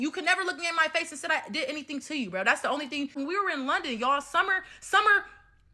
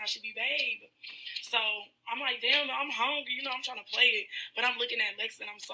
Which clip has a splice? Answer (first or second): first